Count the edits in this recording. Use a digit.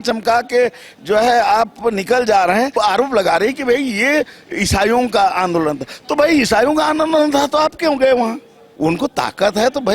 2